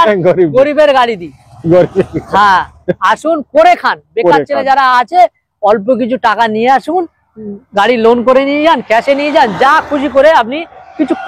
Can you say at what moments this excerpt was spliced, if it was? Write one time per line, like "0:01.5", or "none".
none